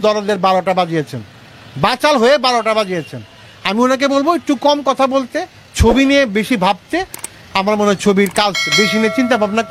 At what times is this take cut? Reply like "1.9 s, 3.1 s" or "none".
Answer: none